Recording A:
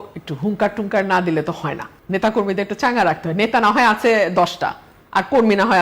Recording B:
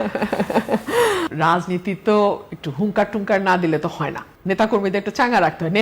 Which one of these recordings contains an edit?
B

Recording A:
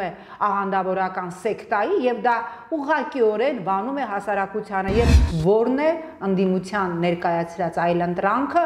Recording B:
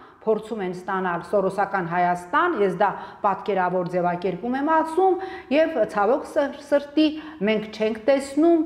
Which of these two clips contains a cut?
A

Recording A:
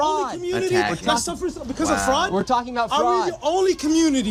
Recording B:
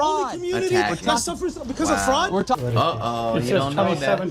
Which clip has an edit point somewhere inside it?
B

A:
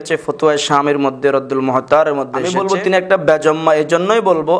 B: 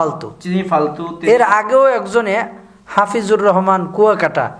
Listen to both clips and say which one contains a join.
A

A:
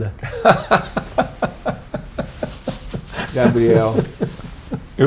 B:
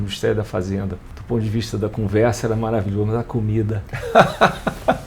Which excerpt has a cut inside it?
B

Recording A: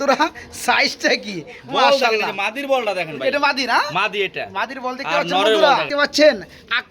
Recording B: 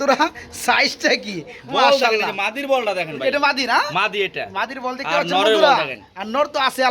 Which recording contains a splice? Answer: A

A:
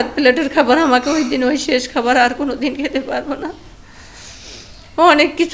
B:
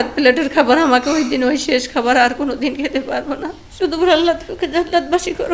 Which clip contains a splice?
B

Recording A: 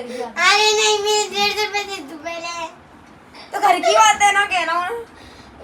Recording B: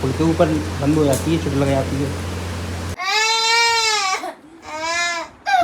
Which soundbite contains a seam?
B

